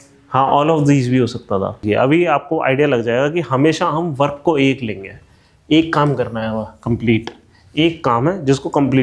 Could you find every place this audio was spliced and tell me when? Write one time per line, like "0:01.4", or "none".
0:01.8